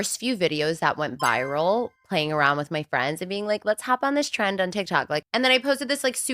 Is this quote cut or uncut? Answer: cut